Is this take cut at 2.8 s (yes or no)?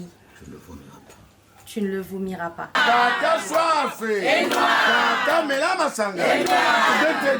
yes